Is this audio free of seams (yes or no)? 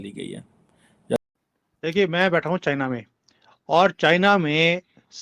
no